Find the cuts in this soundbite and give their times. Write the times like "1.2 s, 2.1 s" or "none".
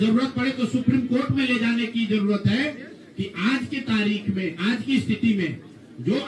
none